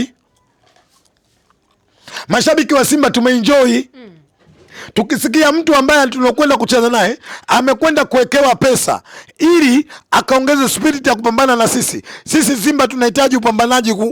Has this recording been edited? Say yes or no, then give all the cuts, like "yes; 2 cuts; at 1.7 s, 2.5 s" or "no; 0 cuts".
no; 0 cuts